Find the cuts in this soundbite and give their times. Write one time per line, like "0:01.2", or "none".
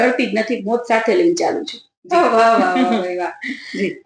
none